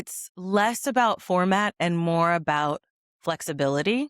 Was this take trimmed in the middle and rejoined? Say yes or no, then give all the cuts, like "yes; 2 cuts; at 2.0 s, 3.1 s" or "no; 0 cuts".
no; 0 cuts